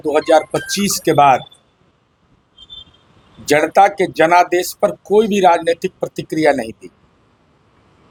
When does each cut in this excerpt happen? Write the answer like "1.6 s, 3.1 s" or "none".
none